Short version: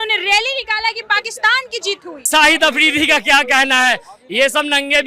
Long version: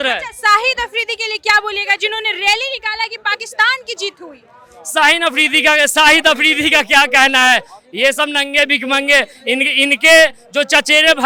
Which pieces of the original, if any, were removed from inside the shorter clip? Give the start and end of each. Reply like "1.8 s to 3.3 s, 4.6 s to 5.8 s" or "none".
4.4 s to 5.9 s